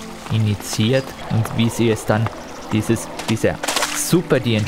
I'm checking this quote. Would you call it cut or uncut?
cut